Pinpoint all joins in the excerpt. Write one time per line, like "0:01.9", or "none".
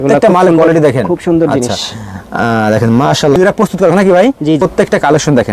0:03.4
0:04.6